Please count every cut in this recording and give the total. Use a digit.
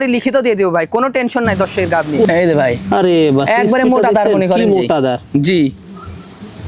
1